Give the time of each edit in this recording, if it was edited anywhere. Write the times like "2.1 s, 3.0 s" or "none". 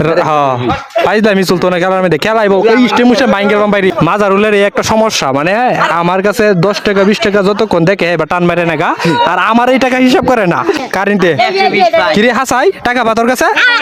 3.9 s, 10.8 s